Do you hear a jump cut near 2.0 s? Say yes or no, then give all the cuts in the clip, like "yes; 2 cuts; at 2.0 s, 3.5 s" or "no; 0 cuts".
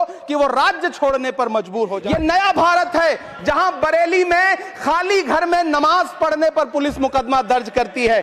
yes; 1 cut; at 2.0 s